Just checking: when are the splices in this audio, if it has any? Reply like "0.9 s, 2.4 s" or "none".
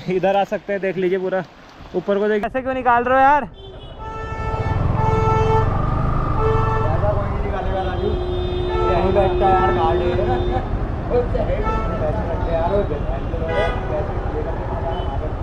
2.4 s